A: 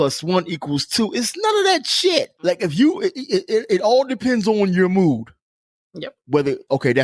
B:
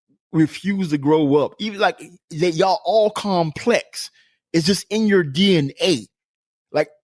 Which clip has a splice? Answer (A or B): A